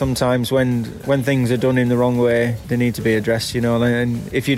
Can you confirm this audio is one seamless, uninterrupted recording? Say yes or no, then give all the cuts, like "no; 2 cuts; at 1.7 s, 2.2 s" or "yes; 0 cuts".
no; 2 cuts; at 0.9 s, 2.6 s